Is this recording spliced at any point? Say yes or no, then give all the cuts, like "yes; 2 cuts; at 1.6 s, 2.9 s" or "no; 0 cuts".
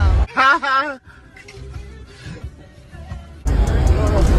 yes; 1 cut; at 3.5 s